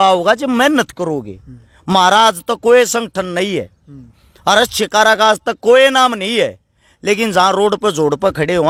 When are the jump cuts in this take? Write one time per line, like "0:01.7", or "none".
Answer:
none